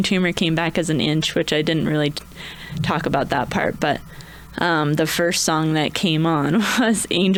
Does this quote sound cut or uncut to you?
uncut